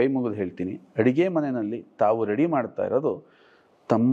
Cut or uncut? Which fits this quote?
uncut